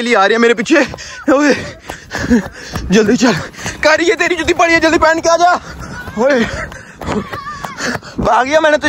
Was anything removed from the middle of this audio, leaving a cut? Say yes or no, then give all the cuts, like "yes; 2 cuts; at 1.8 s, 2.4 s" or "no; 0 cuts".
no; 0 cuts